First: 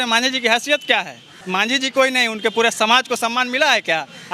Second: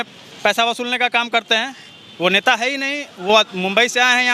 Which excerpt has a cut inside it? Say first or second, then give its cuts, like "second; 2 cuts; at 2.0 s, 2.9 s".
first; 1 cut; at 1.3 s